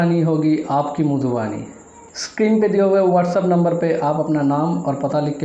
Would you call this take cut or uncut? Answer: uncut